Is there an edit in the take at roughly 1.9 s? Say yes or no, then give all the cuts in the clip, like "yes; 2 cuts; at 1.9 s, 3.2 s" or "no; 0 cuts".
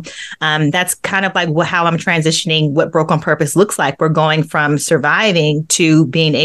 no; 0 cuts